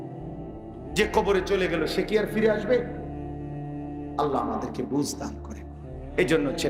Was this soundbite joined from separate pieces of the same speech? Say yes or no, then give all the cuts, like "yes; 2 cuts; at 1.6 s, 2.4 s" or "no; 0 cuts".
yes; 2 cuts; at 2.9 s, 4.2 s